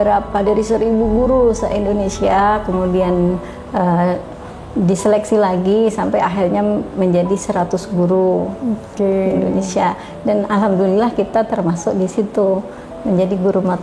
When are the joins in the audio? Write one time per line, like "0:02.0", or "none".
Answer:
none